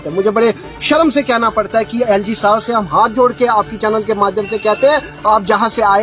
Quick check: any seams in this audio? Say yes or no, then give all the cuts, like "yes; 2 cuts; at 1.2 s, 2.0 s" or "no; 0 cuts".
no; 0 cuts